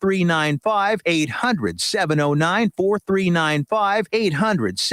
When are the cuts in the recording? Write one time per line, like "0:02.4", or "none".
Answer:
0:01.0
0:04.0